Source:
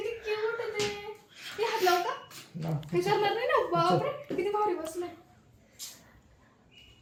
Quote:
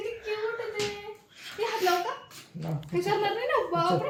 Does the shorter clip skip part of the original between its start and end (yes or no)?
no